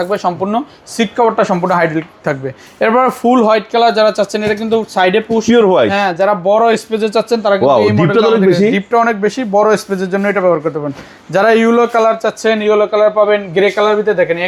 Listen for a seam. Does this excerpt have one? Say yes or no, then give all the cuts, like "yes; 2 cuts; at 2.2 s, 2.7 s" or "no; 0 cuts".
no; 0 cuts